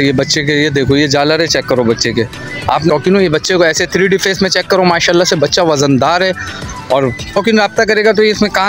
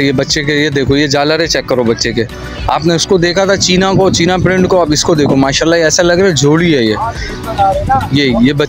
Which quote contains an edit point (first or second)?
first